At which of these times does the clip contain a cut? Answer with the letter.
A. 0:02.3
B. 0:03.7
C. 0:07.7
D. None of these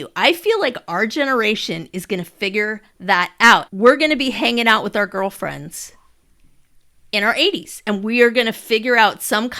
B